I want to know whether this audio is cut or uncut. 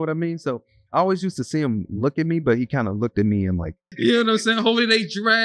cut